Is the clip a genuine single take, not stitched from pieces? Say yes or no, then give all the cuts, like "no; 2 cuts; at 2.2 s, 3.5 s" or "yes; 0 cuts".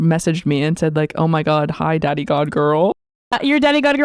yes; 0 cuts